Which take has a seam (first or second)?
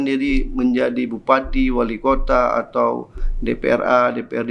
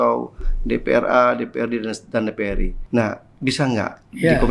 second